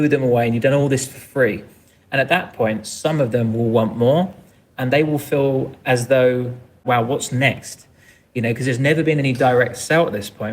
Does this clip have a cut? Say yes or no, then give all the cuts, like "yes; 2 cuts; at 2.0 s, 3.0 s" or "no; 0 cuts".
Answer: yes; 1 cut; at 6.8 s